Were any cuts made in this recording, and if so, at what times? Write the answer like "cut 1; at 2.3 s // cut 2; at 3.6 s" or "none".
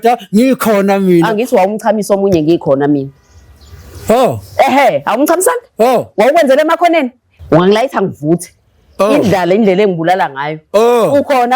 cut 1; at 7.3 s